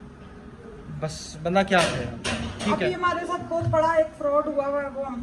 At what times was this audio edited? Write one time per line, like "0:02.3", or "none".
none